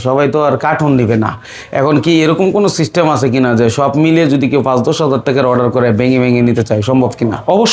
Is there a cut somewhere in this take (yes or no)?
no